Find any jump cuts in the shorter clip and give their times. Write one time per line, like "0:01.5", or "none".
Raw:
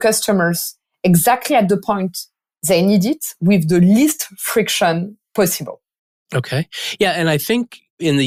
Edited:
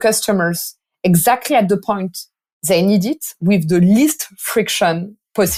none